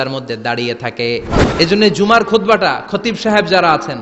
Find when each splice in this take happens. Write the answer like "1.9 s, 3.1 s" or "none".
1.4 s